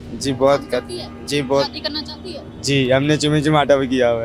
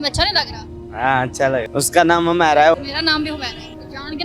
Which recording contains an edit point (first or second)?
second